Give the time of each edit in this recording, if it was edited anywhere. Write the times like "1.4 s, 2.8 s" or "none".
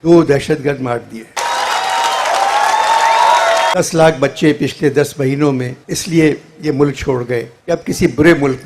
1.3 s, 3.7 s